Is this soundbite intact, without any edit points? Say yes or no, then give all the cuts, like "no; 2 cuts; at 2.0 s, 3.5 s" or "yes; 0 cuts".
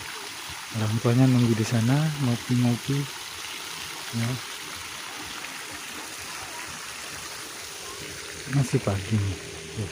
yes; 0 cuts